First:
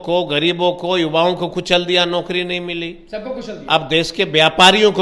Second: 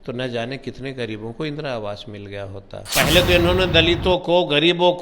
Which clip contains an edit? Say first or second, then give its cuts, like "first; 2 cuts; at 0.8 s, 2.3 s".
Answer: second; 1 cut; at 2.9 s